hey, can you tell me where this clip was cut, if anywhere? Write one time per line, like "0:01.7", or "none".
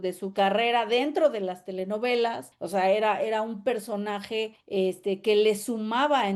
0:02.5
0:04.6